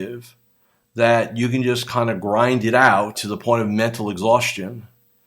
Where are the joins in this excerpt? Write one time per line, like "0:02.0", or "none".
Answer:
0:03.2